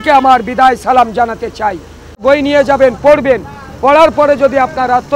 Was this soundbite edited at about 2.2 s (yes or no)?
yes